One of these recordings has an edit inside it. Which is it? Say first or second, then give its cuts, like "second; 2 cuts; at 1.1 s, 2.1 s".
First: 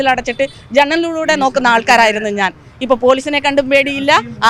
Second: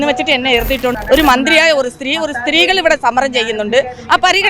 second; 1 cut; at 0.9 s